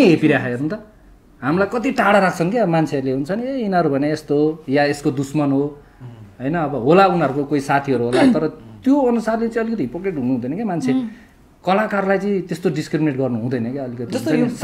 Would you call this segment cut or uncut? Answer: uncut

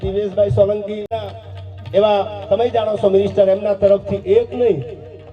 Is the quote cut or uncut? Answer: cut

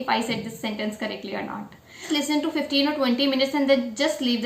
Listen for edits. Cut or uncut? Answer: cut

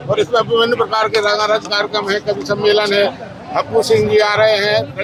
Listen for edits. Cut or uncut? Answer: uncut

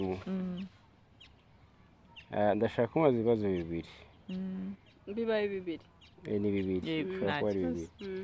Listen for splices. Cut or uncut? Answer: uncut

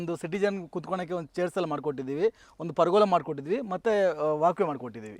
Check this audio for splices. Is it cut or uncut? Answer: uncut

